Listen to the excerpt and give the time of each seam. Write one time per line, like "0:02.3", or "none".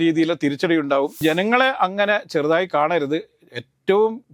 0:01.2